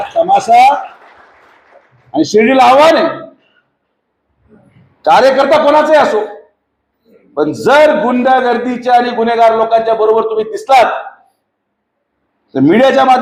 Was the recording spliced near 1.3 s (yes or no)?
no